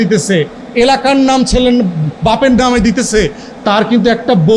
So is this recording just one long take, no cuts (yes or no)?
yes